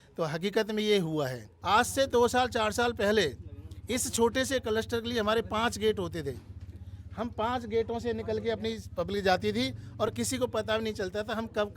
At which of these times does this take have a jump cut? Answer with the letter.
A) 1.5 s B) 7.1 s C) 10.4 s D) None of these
A